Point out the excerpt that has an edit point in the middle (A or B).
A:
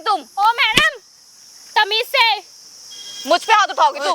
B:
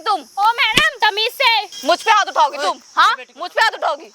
B